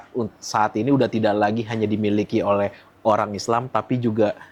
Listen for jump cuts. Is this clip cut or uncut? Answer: uncut